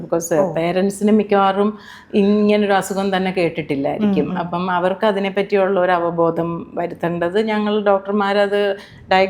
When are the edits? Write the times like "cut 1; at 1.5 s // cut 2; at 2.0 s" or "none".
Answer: none